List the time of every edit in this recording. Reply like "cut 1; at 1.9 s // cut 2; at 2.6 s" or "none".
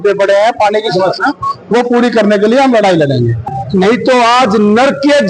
cut 1; at 3.5 s